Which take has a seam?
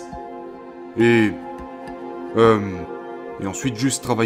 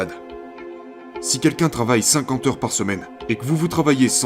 second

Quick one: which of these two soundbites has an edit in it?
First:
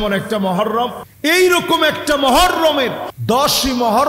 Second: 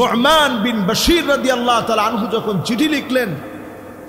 first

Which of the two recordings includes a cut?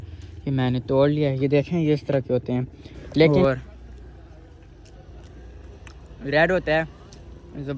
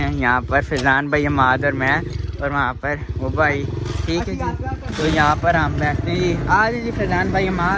first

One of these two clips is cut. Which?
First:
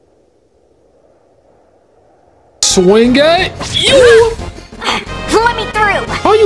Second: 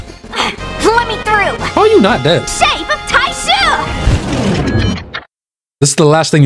first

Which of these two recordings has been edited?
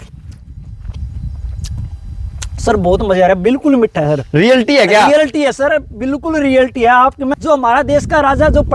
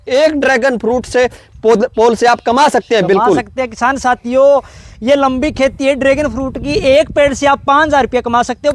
first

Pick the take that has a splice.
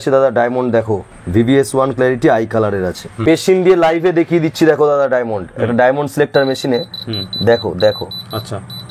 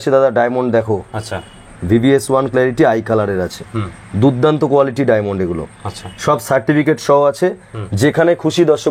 first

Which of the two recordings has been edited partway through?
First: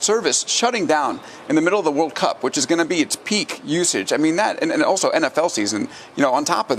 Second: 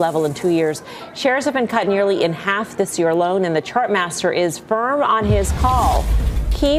first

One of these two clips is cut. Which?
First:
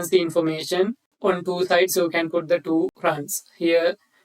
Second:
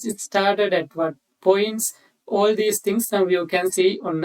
first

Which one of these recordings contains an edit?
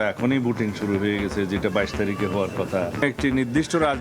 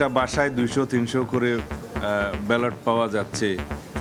first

